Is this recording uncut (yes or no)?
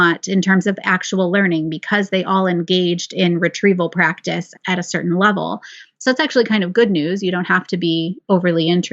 no